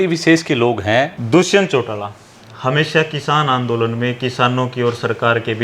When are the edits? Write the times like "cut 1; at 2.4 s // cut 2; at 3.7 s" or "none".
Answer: cut 1; at 1.2 s